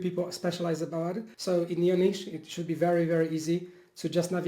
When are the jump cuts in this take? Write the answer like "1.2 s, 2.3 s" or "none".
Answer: 1.3 s